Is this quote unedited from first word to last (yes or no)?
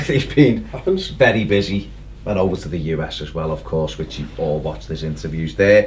yes